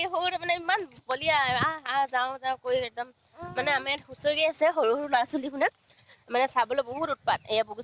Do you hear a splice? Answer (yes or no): no